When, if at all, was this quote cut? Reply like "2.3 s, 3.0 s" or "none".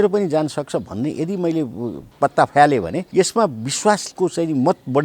2.1 s, 3.0 s, 4.1 s